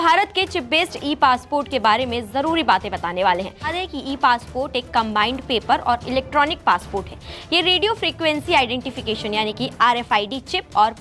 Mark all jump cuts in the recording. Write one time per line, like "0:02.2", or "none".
0:03.7